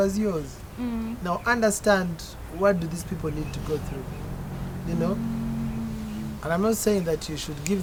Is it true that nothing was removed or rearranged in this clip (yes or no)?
yes